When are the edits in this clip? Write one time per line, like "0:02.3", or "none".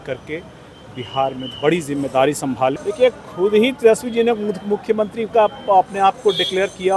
0:02.8